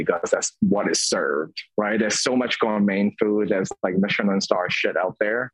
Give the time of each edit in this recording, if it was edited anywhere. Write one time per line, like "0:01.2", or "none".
0:01.6